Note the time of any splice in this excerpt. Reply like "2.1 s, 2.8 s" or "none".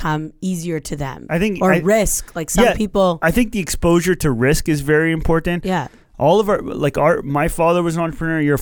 1.2 s, 6.0 s